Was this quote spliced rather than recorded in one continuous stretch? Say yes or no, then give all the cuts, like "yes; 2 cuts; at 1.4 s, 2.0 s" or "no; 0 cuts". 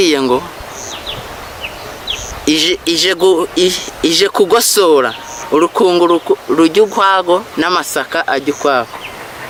no; 0 cuts